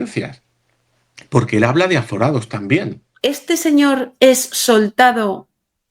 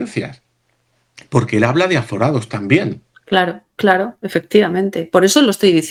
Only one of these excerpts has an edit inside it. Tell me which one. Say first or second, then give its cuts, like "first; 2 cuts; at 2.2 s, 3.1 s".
first; 1 cut; at 3.0 s